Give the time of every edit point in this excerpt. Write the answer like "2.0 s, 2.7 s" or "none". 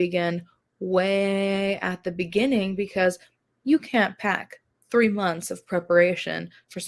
none